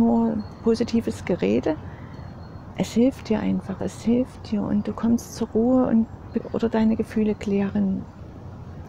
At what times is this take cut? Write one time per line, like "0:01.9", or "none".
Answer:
0:06.4